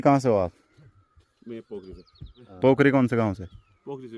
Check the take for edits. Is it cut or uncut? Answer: cut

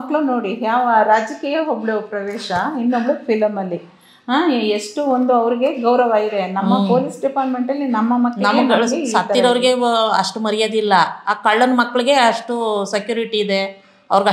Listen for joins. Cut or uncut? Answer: uncut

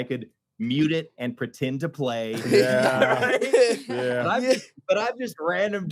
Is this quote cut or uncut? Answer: uncut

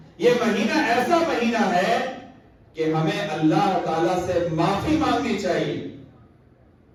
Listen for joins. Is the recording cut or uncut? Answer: uncut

